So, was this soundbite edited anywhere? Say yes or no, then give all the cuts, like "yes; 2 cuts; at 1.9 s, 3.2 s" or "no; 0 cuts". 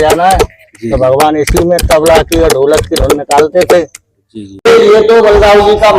yes; 1 cut; at 4.6 s